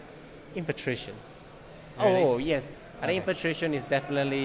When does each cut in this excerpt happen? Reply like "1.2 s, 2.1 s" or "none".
2.7 s